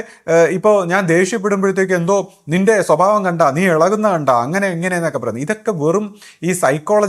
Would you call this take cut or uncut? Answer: uncut